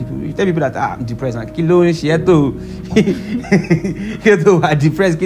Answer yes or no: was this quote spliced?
no